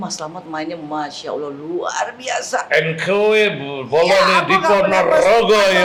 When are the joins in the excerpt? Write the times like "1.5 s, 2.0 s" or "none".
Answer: none